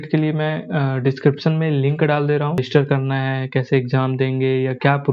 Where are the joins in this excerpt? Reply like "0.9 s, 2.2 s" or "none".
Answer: 2.7 s